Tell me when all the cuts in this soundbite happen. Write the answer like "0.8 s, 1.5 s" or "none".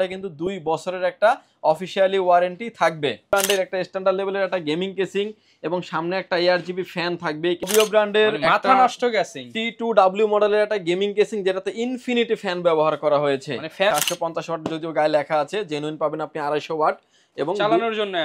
3.3 s, 7.7 s, 13.9 s